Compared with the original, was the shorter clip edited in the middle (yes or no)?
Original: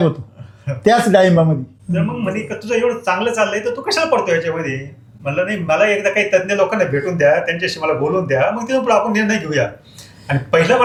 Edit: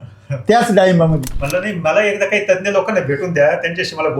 yes